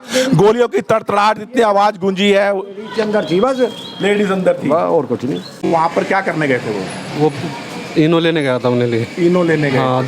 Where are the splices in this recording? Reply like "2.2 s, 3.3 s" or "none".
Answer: 5.6 s